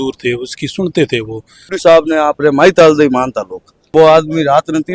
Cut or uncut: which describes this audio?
cut